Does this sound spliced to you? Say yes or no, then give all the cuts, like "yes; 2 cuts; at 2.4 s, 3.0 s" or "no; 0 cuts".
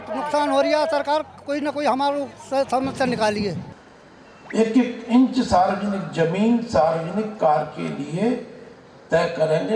yes; 1 cut; at 3.7 s